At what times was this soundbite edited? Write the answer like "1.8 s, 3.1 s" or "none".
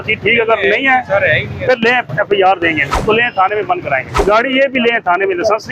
2.9 s, 4.2 s